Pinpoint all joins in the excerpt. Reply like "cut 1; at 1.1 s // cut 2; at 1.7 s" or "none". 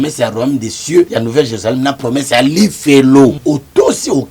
cut 1; at 1.1 s // cut 2; at 3.4 s